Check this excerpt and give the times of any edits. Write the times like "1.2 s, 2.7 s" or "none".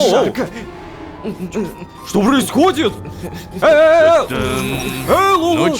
none